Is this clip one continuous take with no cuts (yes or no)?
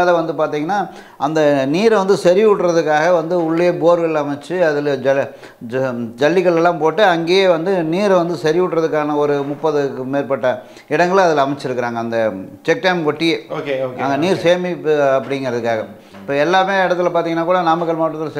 yes